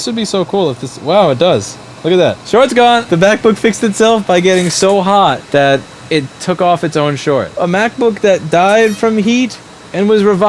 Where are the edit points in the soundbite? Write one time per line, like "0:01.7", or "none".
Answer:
0:02.4
0:03.0
0:05.4
0:07.5